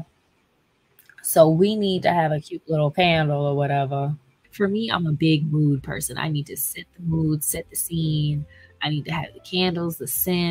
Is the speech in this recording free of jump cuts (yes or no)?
no